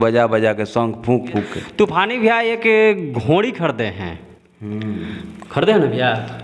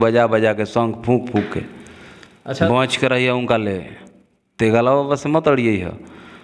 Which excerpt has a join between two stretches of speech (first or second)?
first